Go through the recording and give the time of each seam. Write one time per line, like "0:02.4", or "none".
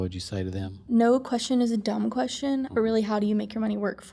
0:00.8
0:02.7